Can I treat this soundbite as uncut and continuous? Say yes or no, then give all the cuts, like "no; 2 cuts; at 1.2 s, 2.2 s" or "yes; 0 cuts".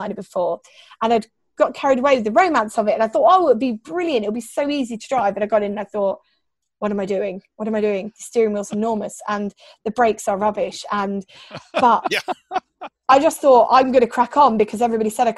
yes; 0 cuts